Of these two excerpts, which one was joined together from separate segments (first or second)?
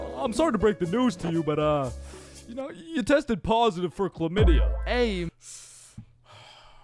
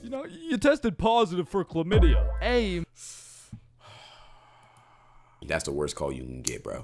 second